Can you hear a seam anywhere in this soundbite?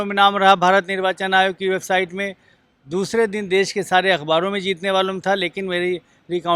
no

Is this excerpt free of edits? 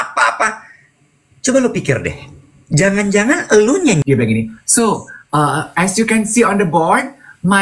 no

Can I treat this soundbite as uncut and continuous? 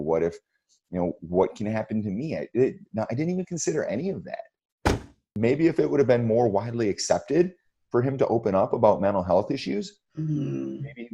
no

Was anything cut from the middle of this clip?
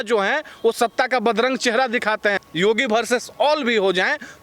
yes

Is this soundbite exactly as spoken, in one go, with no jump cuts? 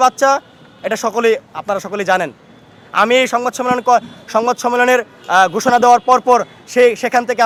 yes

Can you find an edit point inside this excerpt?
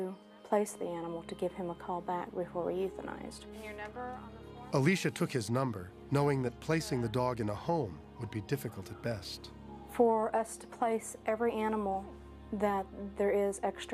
no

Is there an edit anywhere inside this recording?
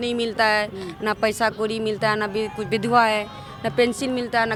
no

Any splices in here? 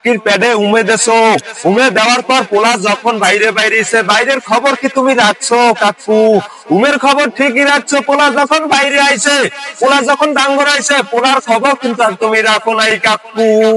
no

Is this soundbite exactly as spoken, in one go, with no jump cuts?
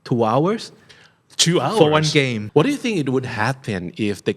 no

